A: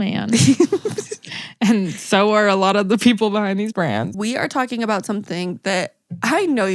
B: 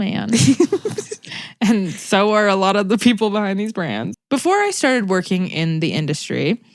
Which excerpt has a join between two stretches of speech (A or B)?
A